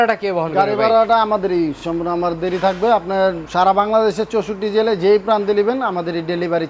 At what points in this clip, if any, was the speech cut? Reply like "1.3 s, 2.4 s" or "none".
none